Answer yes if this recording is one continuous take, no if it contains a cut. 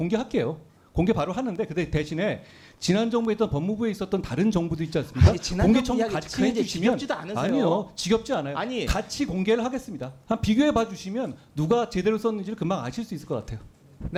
yes